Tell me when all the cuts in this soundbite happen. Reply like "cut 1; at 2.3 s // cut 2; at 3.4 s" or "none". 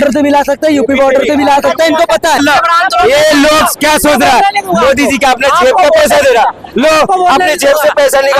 cut 1; at 2.4 s